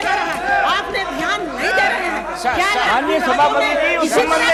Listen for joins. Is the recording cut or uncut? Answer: uncut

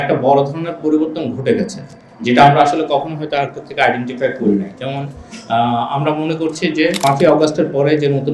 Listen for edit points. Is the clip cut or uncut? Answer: cut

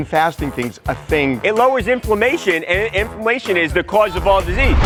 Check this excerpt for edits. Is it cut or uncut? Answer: uncut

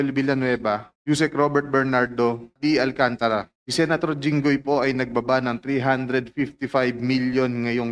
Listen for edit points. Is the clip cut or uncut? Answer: cut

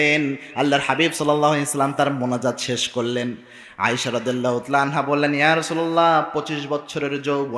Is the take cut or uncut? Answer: uncut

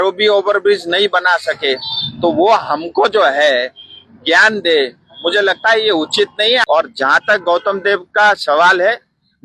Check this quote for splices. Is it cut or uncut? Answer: cut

